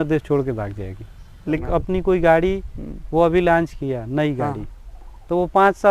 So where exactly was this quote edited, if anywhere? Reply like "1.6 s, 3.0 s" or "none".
1.6 s